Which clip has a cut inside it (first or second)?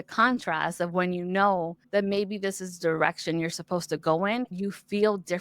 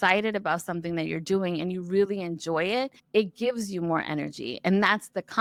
first